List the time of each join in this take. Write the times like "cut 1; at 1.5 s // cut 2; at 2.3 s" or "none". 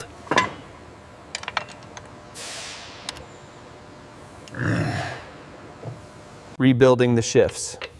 cut 1; at 6.5 s